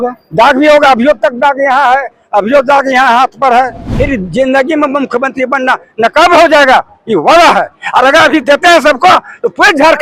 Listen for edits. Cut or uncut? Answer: cut